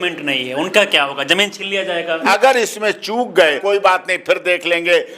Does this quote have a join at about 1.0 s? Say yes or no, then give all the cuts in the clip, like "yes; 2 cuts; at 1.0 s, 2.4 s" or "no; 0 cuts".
no; 2 cuts; at 2.2 s, 3.6 s